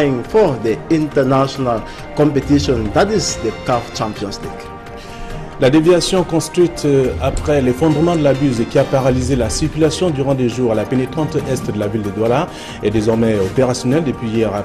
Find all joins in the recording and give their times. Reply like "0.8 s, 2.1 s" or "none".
2.6 s